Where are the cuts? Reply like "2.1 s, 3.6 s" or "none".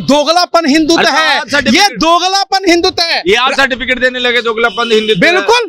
none